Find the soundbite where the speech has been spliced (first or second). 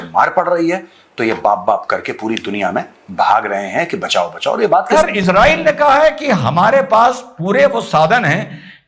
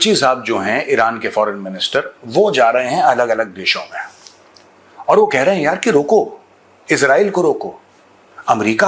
first